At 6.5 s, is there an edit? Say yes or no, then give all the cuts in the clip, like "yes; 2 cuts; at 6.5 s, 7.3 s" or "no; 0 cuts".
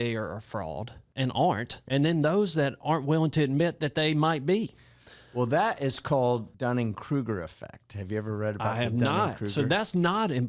yes; 3 cuts; at 1.0 s, 1.7 s, 6.5 s